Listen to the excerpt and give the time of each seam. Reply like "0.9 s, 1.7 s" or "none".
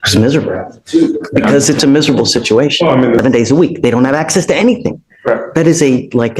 3.2 s